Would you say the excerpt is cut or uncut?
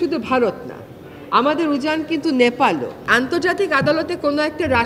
cut